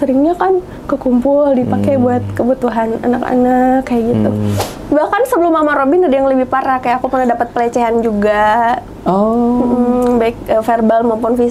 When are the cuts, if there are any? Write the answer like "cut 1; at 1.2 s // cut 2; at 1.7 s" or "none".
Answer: cut 1; at 4.7 s